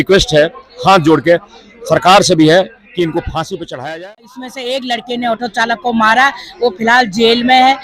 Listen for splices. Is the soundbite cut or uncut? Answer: cut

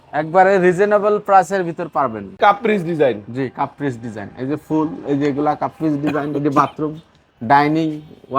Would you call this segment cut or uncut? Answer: cut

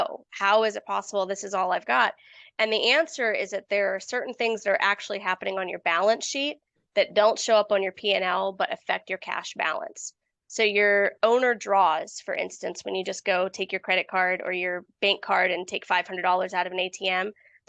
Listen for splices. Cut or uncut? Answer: uncut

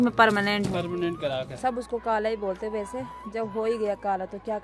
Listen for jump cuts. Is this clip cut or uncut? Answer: cut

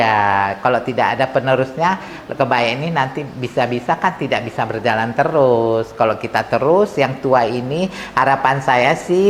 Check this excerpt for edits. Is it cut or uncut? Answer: uncut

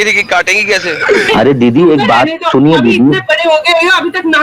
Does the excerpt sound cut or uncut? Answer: cut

